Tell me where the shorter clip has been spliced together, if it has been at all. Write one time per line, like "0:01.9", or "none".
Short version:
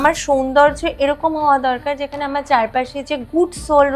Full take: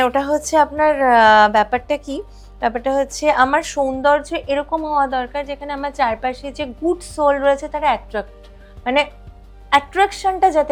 none